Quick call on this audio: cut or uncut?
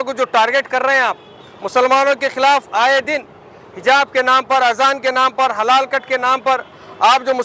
uncut